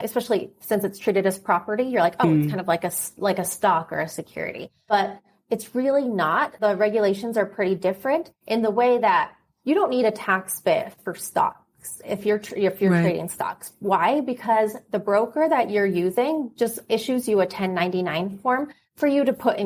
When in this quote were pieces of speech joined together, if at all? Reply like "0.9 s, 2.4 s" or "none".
4.8 s, 6.5 s